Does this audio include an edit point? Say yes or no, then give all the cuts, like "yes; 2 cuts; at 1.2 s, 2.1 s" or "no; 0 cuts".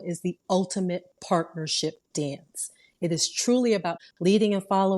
yes; 1 cut; at 4.0 s